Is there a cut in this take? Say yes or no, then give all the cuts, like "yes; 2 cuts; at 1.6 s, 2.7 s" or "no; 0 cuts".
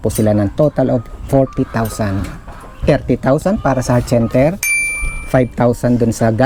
no; 0 cuts